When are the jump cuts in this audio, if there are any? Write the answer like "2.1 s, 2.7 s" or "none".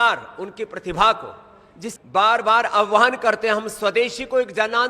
1.8 s